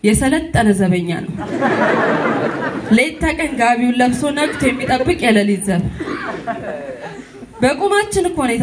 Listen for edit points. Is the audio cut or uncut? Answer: uncut